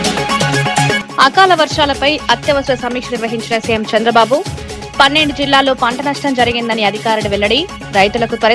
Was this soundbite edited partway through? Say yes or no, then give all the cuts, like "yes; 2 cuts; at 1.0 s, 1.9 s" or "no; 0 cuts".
yes; 1 cut; at 1.0 s